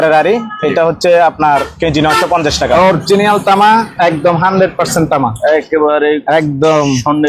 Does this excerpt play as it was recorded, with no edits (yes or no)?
no